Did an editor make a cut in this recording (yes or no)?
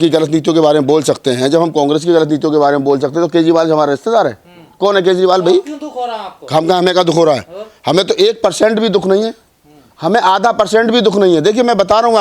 no